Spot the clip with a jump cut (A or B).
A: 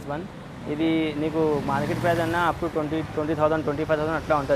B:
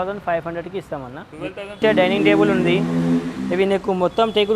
B